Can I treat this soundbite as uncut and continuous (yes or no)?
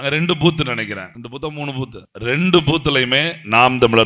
no